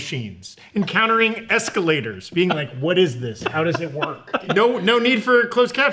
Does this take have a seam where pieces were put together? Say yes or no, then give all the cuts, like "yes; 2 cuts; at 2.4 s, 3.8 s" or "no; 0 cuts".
yes; 1 cut; at 4.4 s